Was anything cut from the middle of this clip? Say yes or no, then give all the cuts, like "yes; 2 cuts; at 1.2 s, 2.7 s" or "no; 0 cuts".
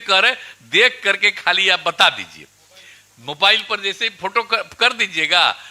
no; 0 cuts